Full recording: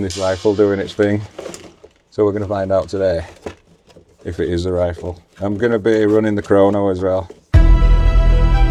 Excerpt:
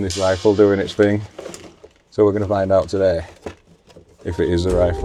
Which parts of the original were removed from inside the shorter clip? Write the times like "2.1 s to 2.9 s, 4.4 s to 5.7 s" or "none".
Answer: none